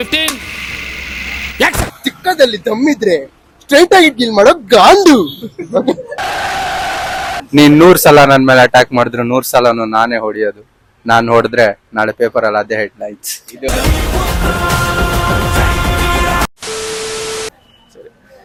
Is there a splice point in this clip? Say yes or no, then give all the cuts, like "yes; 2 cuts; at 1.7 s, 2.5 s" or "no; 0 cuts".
no; 0 cuts